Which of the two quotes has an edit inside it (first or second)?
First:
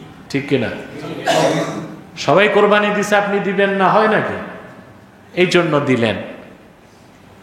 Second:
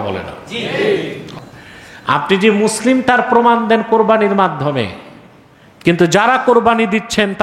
second